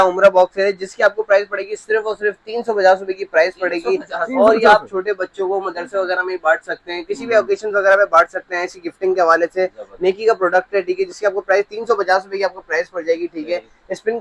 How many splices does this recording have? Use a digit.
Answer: 0